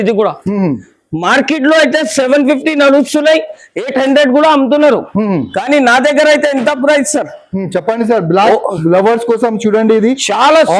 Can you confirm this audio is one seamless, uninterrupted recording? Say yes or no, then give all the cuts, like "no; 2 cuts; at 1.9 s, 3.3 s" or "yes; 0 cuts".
yes; 0 cuts